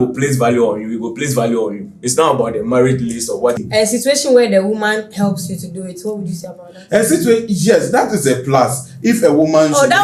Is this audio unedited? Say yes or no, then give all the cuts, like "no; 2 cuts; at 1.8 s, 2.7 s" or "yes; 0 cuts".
no; 1 cut; at 3.6 s